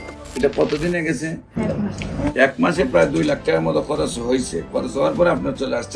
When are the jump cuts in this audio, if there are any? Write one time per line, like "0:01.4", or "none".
0:01.6